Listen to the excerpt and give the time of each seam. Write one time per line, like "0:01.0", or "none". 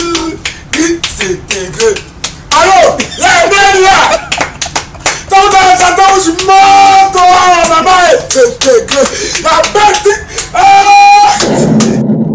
0:11.3